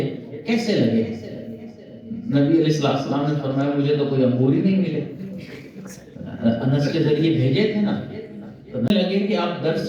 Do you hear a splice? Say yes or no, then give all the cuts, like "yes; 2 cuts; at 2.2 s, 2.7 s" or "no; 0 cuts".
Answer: yes; 1 cut; at 8.9 s